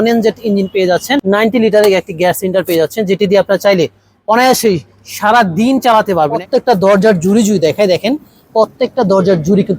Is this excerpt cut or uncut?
cut